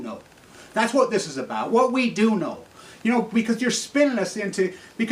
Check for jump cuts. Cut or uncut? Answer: uncut